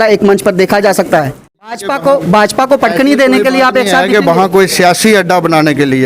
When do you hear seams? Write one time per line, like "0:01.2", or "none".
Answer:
0:01.9